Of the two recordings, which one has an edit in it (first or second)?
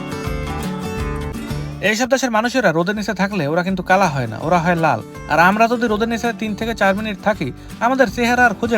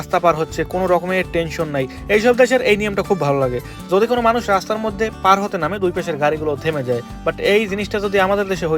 first